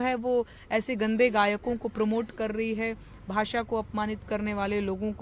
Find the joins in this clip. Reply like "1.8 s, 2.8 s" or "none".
none